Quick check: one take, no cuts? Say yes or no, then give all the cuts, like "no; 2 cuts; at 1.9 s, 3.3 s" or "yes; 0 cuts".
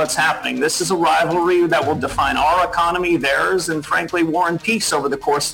yes; 0 cuts